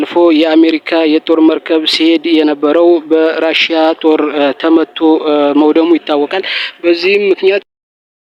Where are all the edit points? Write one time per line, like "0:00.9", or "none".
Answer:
none

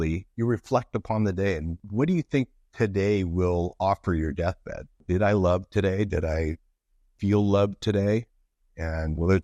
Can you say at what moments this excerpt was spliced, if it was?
none

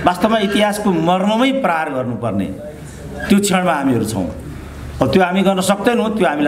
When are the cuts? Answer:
none

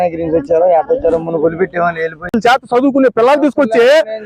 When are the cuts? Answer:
0:02.3

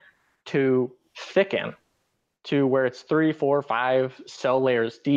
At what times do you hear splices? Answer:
none

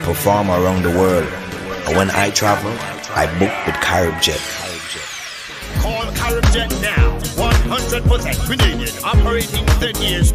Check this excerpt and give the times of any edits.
none

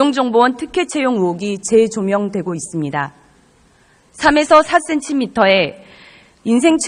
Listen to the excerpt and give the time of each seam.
0:01.0

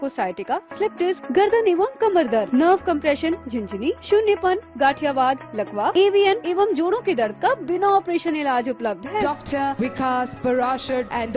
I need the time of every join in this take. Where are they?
none

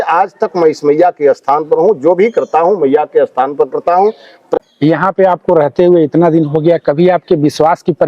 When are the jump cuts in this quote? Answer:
0:04.5

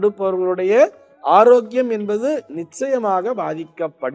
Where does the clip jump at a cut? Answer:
none

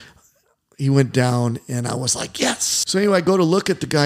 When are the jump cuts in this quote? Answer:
0:02.7

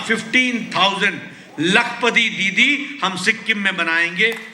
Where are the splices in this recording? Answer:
none

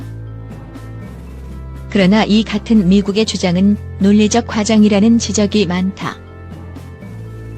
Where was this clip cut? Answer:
0:01.9
0:06.2

